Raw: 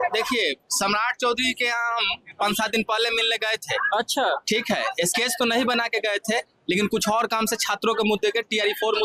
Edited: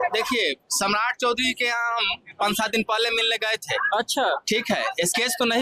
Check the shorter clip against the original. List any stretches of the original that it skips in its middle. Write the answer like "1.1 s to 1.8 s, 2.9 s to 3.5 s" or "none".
none